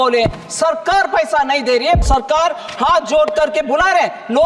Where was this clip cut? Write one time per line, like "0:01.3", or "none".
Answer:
0:02.1